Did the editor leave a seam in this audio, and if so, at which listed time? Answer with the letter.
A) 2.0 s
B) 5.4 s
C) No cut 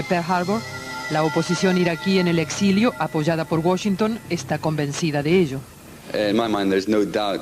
A